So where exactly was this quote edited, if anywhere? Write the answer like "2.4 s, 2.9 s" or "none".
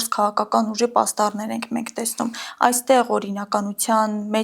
none